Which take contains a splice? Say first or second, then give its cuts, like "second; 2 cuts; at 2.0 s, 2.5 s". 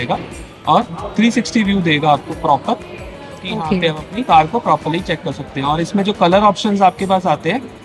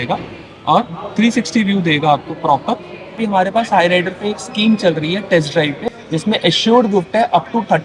second; 2 cuts; at 3.2 s, 5.9 s